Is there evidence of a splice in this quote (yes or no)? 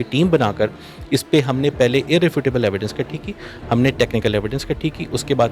no